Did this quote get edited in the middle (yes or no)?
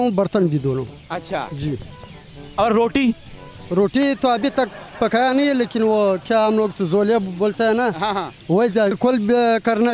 yes